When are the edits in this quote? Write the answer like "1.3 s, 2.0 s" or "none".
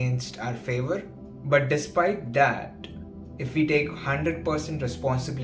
1.3 s